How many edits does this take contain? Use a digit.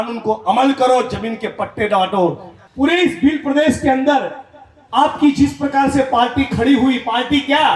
1